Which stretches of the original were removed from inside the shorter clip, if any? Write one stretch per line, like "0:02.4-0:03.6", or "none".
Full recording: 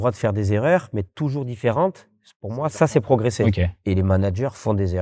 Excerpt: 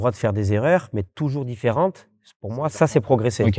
none